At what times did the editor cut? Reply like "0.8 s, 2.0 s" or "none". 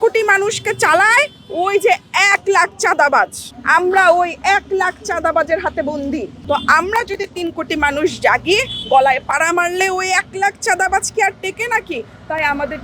none

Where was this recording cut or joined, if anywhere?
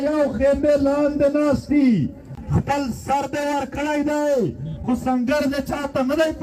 2.3 s

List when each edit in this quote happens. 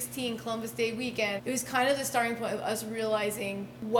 1.4 s

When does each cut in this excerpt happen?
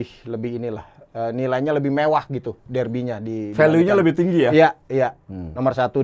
none

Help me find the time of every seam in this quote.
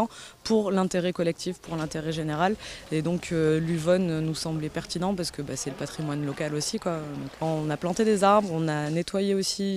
none

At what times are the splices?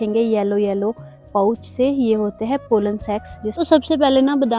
3.6 s

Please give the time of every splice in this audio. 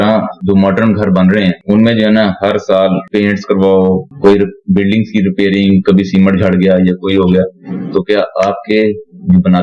none

